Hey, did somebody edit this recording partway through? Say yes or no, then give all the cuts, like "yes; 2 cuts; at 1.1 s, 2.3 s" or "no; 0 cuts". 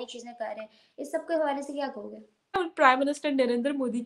yes; 1 cut; at 2.6 s